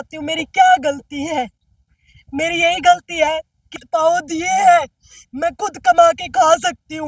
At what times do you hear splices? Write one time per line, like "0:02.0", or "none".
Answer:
0:03.8